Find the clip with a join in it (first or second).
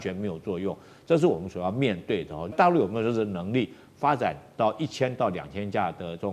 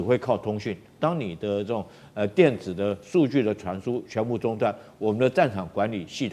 first